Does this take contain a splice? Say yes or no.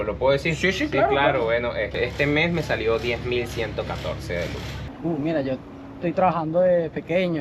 yes